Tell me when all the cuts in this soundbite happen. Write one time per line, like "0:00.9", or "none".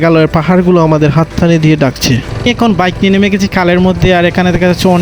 0:02.3